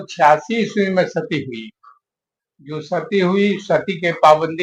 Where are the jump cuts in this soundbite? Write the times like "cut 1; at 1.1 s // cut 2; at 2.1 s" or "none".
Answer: none